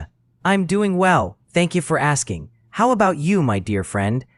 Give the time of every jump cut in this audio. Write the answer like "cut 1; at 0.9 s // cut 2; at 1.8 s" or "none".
none